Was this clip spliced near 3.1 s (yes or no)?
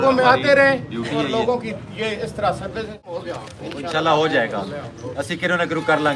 yes